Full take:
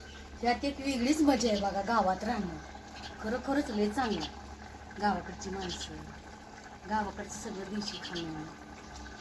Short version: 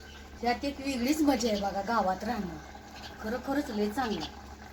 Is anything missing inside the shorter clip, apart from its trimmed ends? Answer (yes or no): no